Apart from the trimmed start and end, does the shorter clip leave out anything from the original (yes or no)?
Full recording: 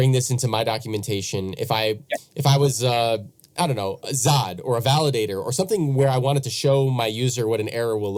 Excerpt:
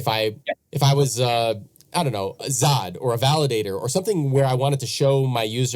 no